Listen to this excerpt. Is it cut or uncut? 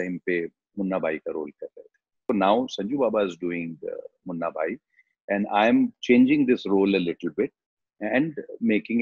cut